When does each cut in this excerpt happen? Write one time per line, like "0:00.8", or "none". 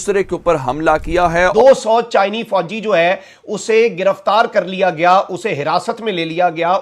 0:01.3